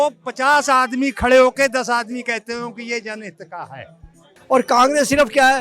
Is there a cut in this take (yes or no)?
yes